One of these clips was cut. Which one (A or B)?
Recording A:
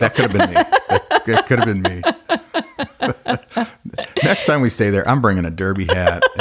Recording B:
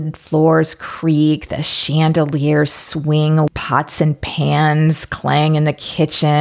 B